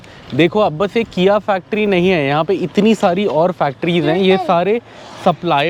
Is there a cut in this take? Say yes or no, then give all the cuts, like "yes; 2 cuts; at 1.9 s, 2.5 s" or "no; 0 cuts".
no; 0 cuts